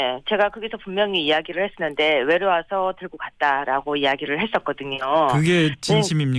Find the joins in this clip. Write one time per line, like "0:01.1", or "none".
0:01.2